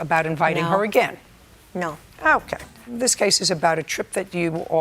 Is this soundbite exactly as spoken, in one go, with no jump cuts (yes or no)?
no